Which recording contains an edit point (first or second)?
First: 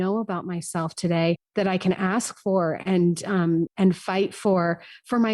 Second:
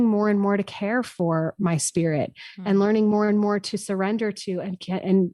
first